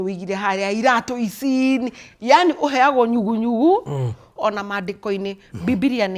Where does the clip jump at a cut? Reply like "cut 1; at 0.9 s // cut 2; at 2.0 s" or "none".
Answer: cut 1; at 4.3 s